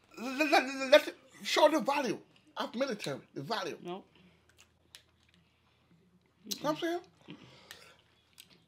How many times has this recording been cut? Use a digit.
0